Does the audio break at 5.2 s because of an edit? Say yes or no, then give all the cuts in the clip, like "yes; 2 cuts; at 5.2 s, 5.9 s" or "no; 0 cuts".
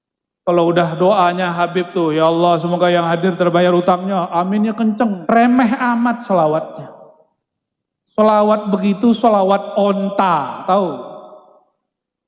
yes; 1 cut; at 5.2 s